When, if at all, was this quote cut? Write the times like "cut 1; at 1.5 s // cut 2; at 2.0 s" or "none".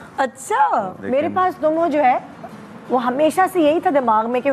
cut 1; at 1.0 s